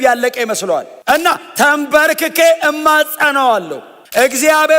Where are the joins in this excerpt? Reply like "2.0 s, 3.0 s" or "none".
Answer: 0.9 s

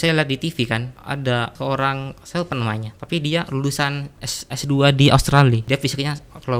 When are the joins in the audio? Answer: 0.9 s, 5.6 s

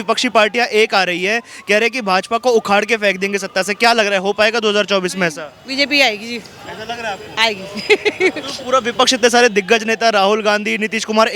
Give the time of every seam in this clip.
none

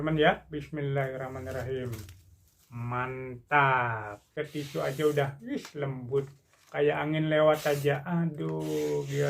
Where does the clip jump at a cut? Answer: 4.4 s

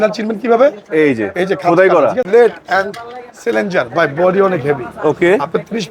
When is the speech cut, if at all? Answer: 2.3 s

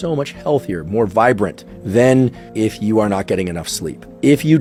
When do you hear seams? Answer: none

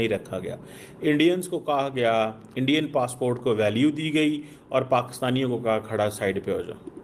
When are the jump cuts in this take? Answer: none

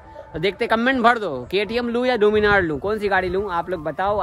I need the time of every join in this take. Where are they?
none

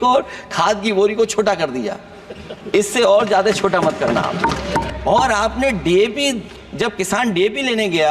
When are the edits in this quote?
4.9 s

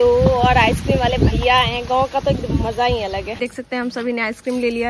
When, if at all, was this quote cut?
3.3 s

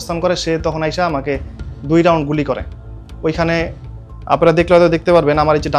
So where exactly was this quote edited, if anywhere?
none

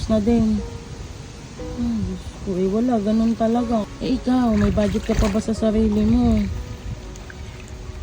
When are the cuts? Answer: 3.8 s

